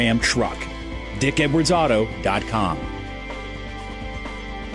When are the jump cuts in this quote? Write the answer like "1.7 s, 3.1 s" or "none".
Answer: 2.8 s

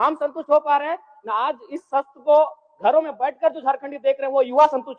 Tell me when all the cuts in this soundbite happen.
none

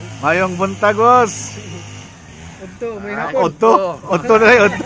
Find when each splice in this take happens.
none

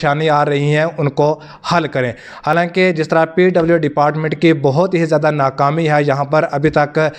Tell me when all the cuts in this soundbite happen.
none

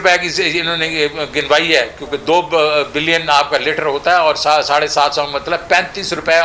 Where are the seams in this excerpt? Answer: none

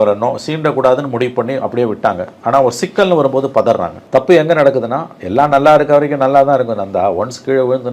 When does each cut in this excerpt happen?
4.0 s

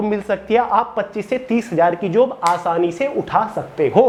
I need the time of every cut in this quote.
none

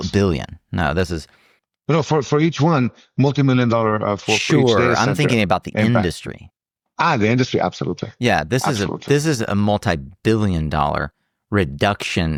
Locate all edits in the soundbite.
none

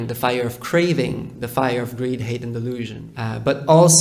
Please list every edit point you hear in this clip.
3.0 s

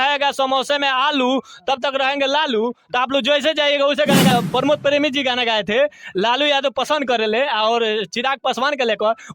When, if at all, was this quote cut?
4.3 s

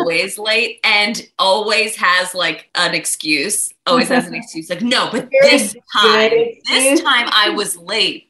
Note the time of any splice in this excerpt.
2.6 s

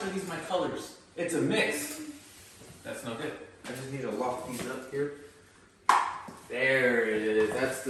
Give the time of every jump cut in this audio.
none

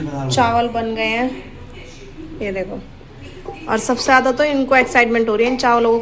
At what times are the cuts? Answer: none

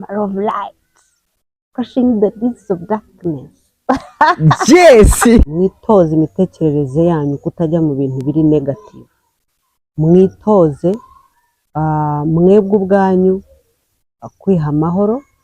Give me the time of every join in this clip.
5.5 s

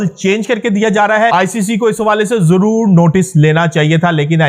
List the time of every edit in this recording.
1.3 s

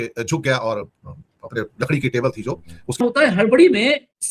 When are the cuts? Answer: 3.0 s

